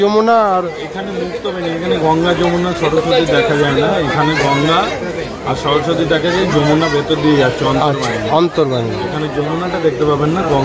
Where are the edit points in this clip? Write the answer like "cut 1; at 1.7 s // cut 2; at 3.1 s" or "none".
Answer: none

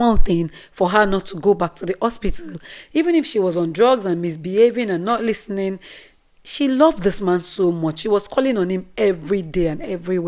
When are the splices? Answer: none

